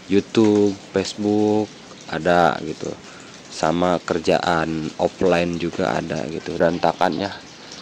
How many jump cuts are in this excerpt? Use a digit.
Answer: 1